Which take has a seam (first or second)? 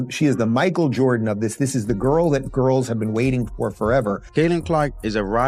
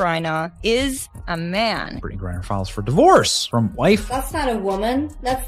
first